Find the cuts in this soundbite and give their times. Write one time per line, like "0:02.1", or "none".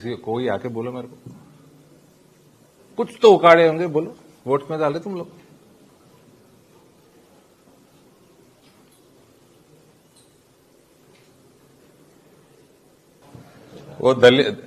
0:13.2